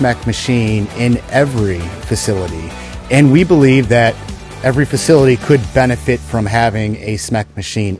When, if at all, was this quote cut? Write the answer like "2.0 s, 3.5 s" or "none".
none